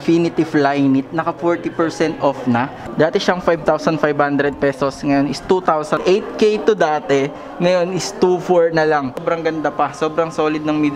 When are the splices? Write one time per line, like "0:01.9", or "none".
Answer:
0:02.8
0:06.0
0:09.2